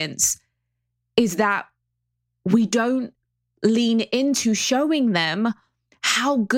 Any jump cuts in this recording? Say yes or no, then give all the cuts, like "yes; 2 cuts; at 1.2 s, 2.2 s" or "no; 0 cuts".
no; 0 cuts